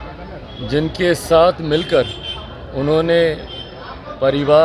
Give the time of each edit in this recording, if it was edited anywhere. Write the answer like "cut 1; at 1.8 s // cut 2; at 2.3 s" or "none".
none